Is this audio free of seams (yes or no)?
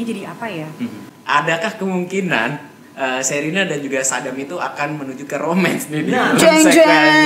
no